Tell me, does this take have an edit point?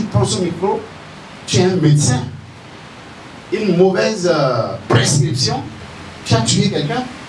no; 0 cuts

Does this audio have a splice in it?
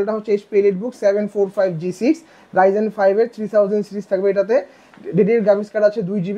no; 0 cuts

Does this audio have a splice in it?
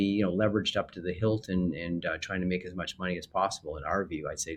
no; 0 cuts

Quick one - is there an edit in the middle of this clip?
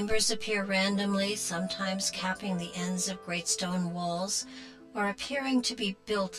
yes; 1 cut; at 3.5 s

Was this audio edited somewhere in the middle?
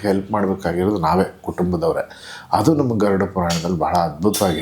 no; 0 cuts

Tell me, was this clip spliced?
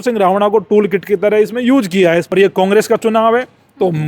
yes; 1 cut; at 2.3 s

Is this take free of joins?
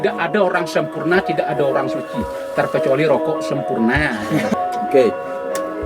no; 1 cut; at 4.5 s

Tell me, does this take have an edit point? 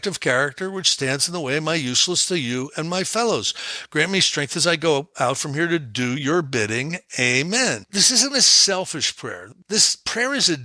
yes; 2 cuts; at 7.9 s, 9.4 s

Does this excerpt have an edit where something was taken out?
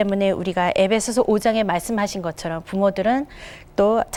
no; 0 cuts

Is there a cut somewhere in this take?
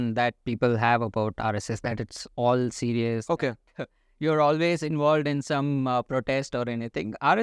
no; 0 cuts

